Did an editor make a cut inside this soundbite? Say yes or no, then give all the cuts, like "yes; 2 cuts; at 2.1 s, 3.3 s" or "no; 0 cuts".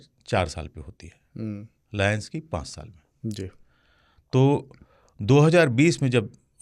no; 0 cuts